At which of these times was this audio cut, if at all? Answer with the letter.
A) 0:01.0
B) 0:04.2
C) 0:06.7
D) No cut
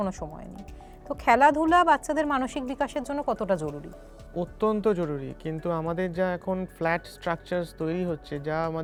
D